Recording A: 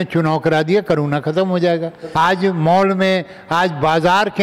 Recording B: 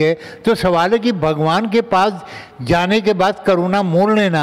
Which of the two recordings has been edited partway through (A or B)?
A